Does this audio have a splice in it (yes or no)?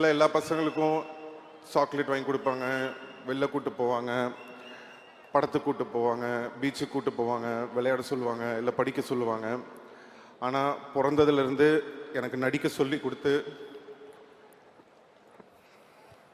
no